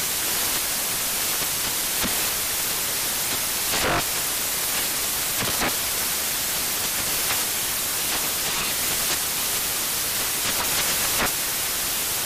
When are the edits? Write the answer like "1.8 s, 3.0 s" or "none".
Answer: none